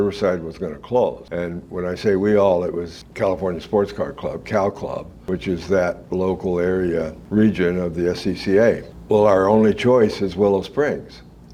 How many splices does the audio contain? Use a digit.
0